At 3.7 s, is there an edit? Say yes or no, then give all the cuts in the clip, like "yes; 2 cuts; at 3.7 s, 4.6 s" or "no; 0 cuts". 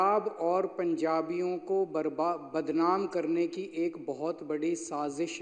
no; 0 cuts